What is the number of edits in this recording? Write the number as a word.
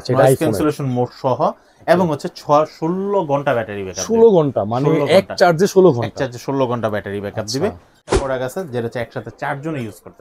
one